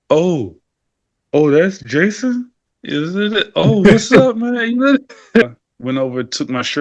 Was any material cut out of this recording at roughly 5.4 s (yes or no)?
yes